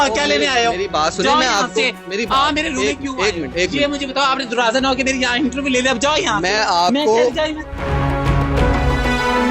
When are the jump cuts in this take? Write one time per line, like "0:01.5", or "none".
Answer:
0:07.6